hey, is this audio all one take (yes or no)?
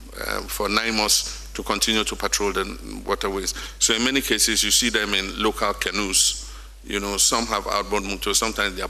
yes